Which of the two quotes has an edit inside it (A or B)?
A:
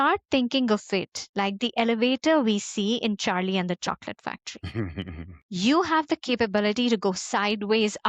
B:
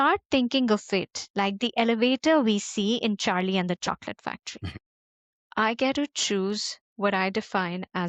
B